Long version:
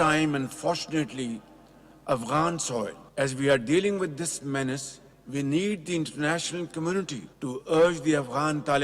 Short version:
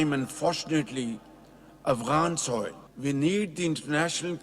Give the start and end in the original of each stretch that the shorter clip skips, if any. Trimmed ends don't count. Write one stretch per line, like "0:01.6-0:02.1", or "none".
0:03.0-0:05.1